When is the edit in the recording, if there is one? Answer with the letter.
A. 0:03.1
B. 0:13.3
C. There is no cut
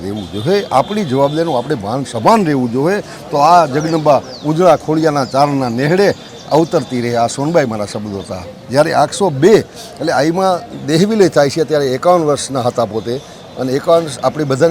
C